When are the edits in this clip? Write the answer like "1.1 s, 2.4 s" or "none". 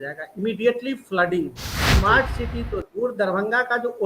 1.9 s